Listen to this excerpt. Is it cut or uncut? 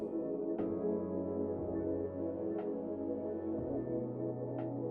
uncut